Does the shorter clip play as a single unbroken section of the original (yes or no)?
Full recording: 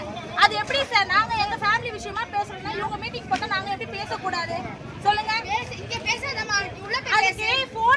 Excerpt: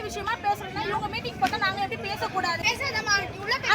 no